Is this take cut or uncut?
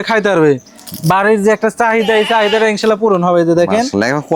uncut